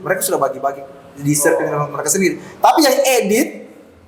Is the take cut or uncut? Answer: uncut